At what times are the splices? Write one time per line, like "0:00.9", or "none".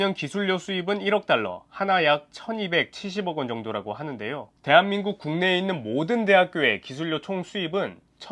0:04.5